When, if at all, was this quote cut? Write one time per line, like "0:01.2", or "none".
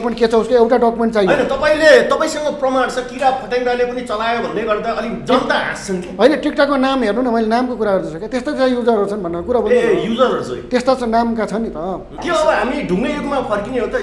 0:12.1